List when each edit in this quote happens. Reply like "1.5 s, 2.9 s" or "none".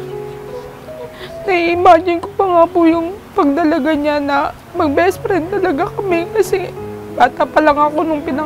4.6 s